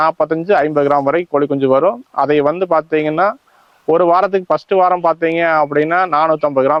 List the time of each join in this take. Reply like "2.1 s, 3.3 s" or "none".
none